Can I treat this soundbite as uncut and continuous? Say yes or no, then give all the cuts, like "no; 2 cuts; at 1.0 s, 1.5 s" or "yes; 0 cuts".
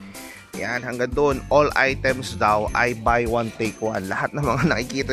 yes; 0 cuts